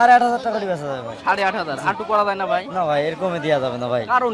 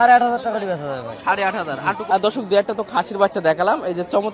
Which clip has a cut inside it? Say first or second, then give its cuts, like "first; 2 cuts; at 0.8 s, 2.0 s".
second; 1 cut; at 2.0 s